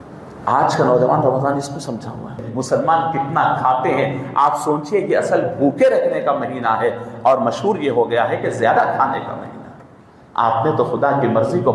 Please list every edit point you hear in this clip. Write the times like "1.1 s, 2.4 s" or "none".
2.4 s